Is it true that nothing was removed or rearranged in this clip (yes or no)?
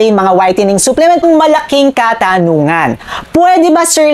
no